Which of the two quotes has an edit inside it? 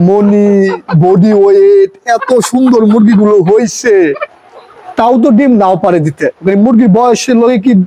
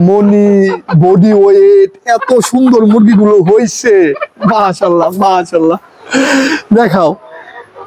first; 1 cut; at 4.3 s

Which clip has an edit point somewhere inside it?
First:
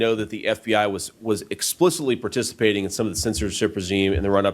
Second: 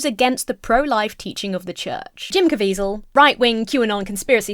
second; 2 cuts; at 2.3 s, 3.0 s

